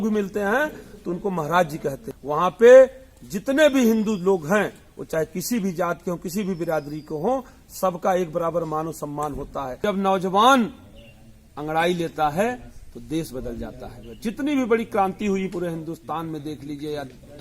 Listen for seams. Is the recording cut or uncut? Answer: cut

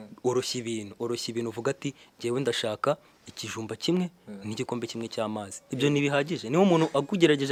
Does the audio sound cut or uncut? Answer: uncut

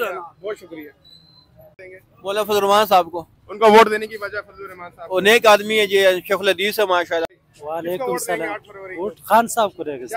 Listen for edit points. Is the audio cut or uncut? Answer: cut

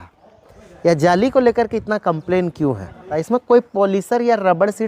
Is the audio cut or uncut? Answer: cut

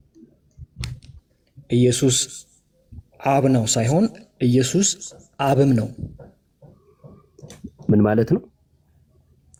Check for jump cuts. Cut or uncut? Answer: uncut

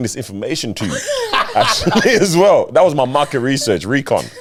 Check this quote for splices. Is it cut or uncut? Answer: uncut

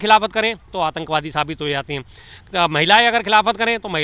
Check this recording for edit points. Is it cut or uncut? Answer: uncut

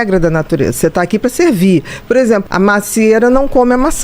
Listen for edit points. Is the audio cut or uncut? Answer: cut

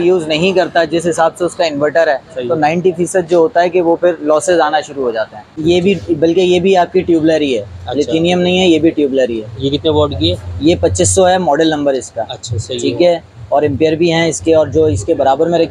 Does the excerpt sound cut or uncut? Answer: cut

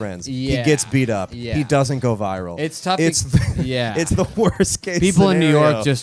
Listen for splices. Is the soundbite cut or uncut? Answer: uncut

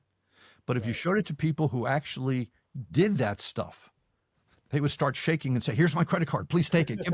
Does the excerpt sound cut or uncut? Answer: uncut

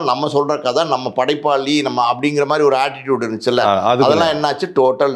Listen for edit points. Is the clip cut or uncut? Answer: uncut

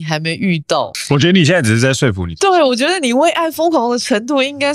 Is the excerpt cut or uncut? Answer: cut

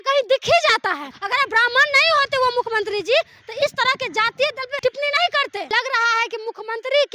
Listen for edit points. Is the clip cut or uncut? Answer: cut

